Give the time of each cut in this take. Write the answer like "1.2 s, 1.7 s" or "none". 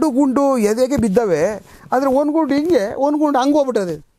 none